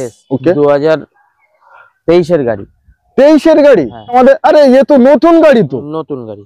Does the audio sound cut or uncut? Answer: cut